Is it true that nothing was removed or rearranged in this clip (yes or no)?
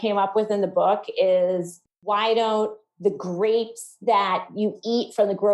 yes